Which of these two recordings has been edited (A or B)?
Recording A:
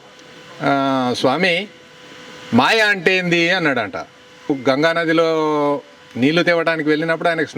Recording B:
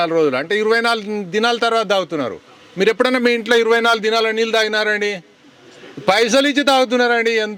A